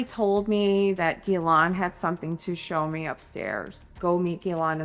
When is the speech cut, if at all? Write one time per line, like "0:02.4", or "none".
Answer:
0:03.9